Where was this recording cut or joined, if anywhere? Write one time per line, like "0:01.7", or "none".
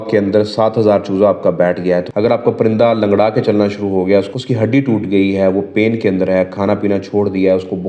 0:02.1
0:04.3

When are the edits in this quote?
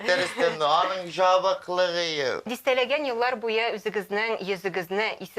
0:02.5

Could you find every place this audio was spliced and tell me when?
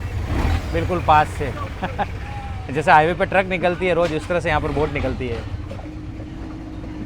none

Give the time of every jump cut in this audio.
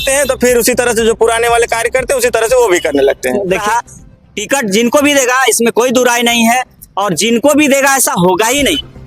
0:03.6

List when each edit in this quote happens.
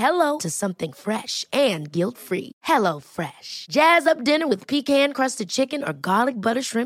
none

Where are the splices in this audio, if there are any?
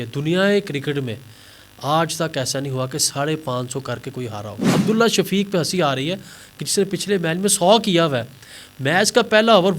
0:04.7

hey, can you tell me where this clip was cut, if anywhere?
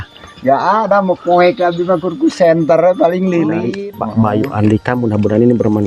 0:03.7

